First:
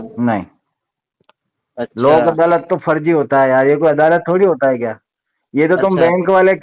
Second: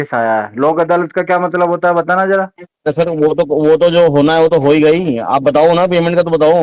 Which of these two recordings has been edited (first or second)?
second